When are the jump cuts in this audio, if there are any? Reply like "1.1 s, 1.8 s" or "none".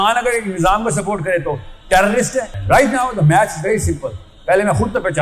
2.6 s